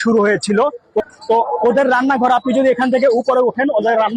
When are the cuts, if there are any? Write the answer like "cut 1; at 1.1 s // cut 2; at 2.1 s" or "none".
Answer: cut 1; at 1.1 s